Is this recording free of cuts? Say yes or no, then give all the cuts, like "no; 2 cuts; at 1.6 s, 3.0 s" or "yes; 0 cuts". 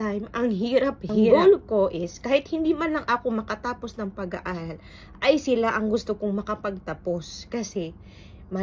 no; 1 cut; at 1.3 s